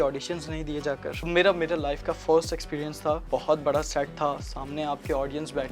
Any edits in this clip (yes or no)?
yes